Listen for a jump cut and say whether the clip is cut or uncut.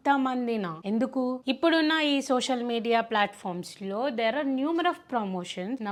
uncut